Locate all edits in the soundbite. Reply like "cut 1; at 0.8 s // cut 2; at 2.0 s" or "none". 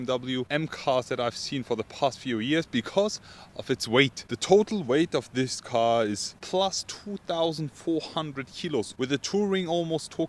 none